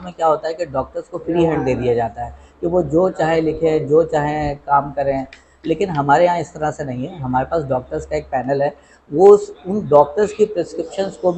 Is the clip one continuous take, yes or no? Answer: yes